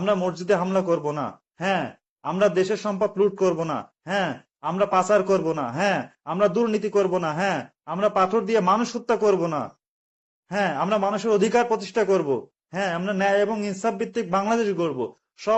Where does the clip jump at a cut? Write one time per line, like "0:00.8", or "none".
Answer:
none